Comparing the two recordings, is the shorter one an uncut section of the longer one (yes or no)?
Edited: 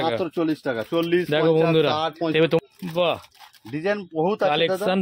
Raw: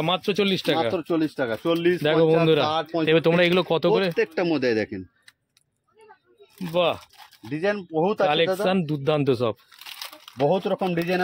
no